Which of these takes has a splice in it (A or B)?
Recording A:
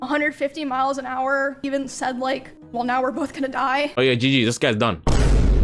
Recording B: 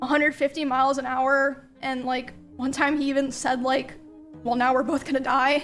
A